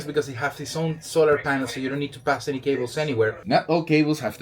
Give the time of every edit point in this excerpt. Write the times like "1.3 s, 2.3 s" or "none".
3.4 s